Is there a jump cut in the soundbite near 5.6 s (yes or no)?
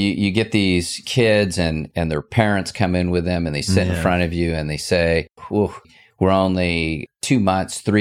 yes